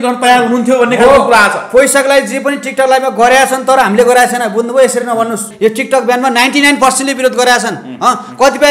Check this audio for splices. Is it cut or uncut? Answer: cut